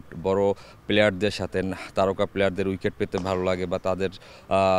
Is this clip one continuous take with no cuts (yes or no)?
yes